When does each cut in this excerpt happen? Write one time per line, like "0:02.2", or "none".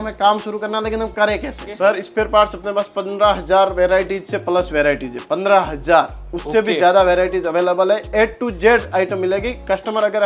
0:01.7